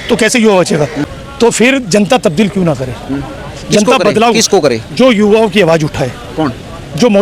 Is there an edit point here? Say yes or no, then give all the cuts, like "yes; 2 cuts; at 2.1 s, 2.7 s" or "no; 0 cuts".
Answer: yes; 1 cut; at 1.0 s